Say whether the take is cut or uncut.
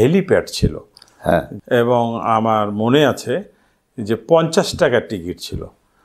cut